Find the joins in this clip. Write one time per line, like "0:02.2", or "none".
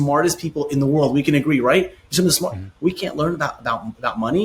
none